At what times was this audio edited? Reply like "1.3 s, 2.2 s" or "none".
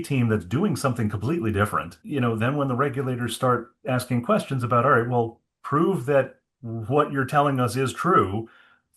2.3 s

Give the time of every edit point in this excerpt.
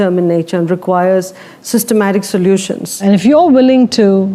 2.9 s

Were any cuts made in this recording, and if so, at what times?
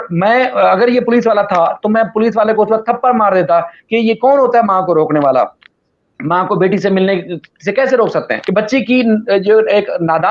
8.4 s

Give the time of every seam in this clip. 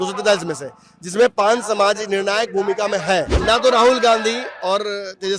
3.3 s

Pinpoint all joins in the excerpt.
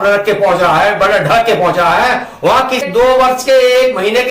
2.9 s

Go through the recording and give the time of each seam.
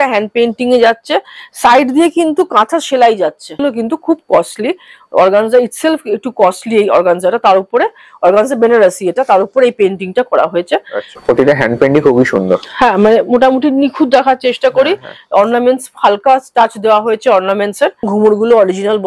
3.6 s, 11.0 s, 18.1 s

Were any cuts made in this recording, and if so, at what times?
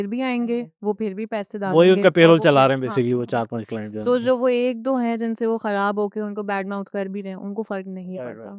none

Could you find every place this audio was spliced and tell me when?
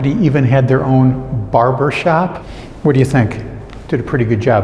2.4 s

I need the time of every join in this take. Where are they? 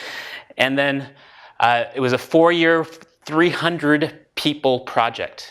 1.2 s

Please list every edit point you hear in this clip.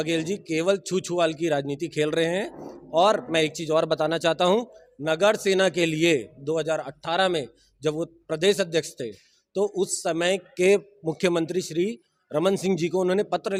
none

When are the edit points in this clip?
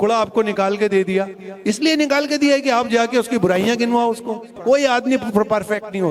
none

